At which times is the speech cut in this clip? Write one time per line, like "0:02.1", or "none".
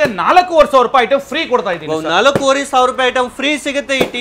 none